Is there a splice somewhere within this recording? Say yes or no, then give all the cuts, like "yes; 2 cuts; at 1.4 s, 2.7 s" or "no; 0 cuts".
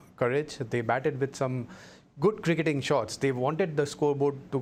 no; 0 cuts